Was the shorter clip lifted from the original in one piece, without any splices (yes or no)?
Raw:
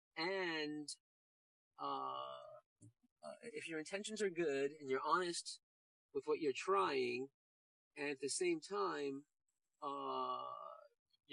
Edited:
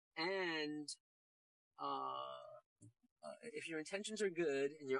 yes